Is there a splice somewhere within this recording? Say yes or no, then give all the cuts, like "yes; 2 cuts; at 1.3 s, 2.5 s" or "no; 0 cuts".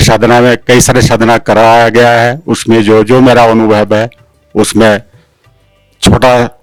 no; 0 cuts